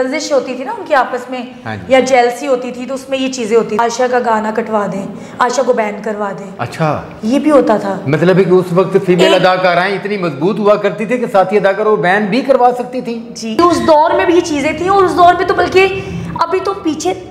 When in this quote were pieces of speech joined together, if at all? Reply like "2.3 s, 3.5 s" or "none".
3.8 s, 13.6 s